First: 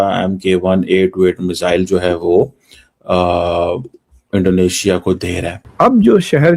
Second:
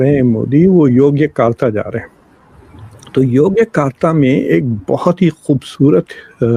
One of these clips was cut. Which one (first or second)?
first